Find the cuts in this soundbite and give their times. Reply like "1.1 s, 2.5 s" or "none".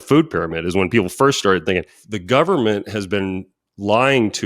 2.0 s